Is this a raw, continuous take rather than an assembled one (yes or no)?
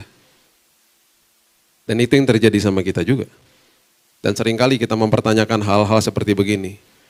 yes